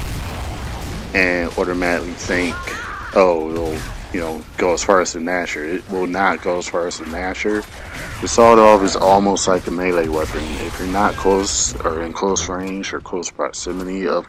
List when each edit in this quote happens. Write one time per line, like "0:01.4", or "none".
none

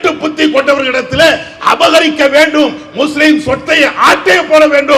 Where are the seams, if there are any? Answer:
none

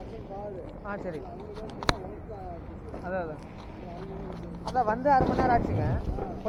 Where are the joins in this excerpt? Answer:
none

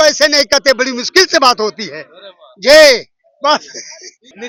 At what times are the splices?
none

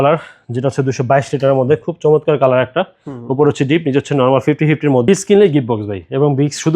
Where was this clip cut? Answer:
0:05.1

